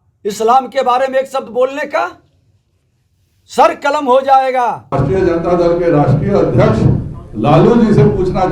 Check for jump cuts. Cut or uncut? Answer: cut